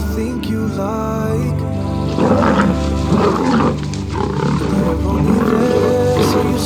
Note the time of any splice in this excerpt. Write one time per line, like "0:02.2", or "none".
none